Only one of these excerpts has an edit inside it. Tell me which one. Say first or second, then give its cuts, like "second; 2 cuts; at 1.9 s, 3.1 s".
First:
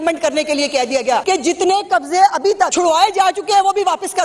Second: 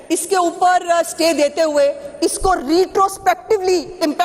first; 2 cuts; at 1.2 s, 2.7 s